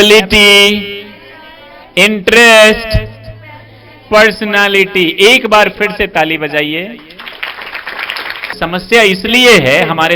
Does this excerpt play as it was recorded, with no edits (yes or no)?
no